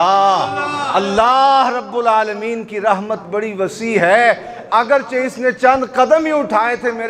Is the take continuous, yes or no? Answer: yes